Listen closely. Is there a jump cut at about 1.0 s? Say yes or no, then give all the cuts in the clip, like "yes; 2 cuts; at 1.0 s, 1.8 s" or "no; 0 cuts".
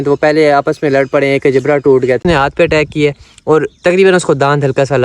no; 1 cut; at 2.2 s